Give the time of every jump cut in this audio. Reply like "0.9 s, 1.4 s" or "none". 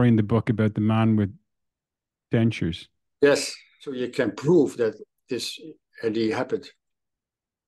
4.0 s